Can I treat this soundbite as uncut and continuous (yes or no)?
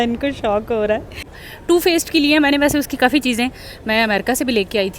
no